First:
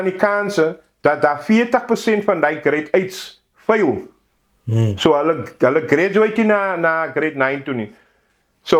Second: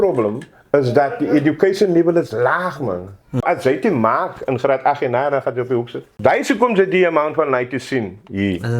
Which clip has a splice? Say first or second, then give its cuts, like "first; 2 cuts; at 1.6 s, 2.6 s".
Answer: second; 2 cuts; at 3.4 s, 6.0 s